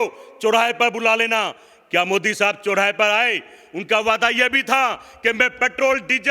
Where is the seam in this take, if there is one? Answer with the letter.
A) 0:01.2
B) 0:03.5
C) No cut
C